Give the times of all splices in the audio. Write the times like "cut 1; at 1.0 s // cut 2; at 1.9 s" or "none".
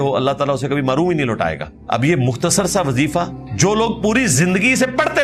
cut 1; at 1.7 s // cut 2; at 3.4 s